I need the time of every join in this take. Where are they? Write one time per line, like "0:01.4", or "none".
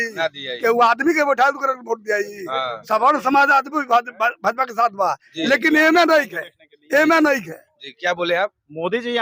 none